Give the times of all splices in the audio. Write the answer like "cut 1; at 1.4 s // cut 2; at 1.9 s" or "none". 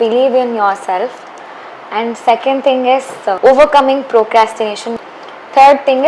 cut 1; at 3.4 s // cut 2; at 4.9 s